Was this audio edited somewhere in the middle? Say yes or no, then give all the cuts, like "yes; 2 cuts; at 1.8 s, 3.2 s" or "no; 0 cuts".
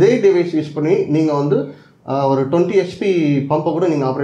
no; 0 cuts